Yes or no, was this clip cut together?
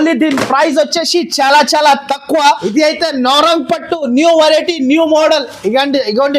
yes